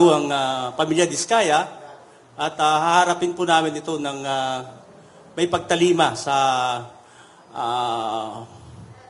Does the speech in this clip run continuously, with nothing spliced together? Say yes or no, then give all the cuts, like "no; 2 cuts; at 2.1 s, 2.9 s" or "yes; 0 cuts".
yes; 0 cuts